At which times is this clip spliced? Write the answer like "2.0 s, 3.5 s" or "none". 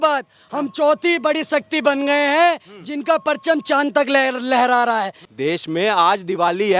5.2 s